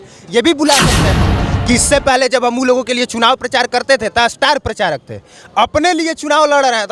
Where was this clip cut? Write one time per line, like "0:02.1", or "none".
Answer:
0:01.2